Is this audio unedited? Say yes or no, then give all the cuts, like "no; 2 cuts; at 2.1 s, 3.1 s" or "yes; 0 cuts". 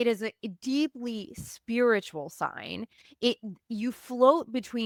yes; 0 cuts